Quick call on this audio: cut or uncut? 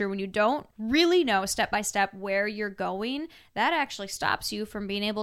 uncut